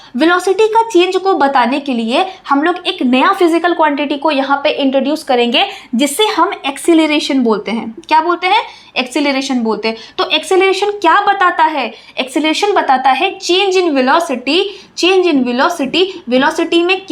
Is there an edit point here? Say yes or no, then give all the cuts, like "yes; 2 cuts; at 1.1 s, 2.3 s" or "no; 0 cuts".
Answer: no; 0 cuts